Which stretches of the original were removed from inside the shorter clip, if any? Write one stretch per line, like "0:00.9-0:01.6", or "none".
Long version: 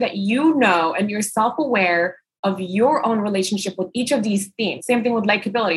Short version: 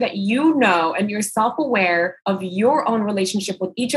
0:02.2-0:02.3

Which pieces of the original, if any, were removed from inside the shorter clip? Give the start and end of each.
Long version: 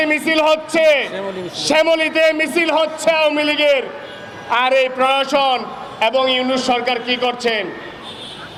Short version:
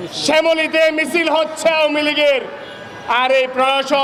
none

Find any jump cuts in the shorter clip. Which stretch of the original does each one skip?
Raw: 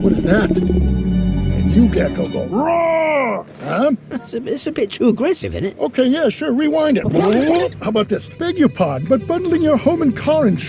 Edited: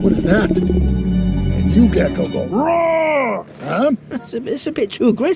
none

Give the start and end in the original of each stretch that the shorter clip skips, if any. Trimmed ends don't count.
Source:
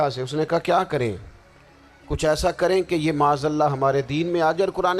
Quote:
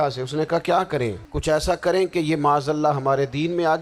0:01.3-0:02.0

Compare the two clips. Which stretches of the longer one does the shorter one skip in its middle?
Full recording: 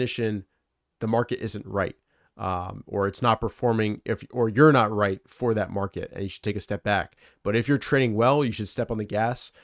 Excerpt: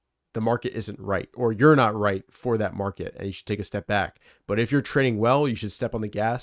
0:02.0-0:04.3

